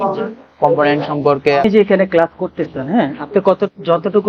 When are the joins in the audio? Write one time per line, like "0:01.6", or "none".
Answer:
0:01.6